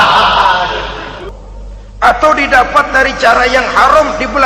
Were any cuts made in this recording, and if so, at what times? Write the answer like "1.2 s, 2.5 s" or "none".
1.1 s

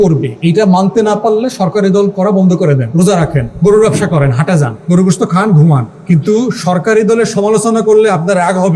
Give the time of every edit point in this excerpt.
3.0 s, 4.7 s, 5.9 s

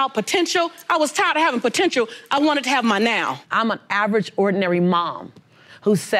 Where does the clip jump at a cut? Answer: 3.4 s

